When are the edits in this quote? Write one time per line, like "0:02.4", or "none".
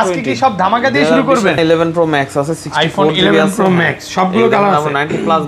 0:01.6